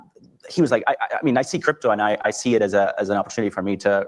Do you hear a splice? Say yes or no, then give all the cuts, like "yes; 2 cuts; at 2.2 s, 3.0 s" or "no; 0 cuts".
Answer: no; 0 cuts